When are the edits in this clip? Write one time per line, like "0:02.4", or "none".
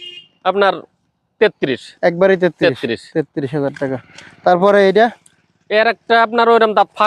none